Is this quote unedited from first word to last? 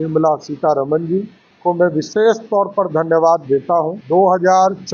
no; 2 cuts; at 1.4 s, 4.0 s

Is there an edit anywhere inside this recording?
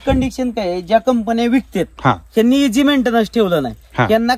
no; 0 cuts

